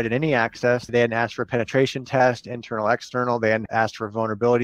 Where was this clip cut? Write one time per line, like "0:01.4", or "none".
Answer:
0:00.9
0:03.6